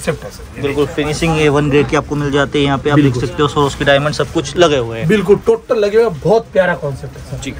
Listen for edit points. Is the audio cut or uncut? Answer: uncut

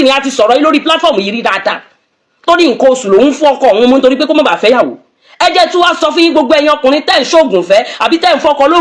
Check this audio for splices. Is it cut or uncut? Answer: uncut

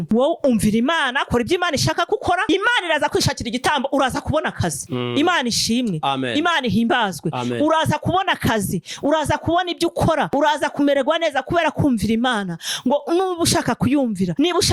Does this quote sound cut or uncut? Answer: uncut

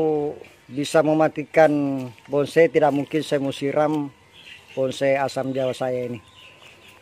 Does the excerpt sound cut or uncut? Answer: uncut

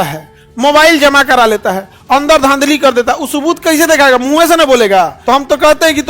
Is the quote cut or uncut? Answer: cut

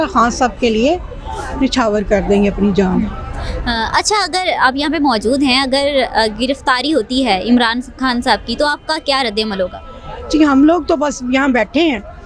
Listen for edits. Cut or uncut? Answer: uncut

